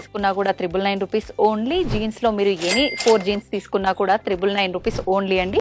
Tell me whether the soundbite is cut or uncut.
uncut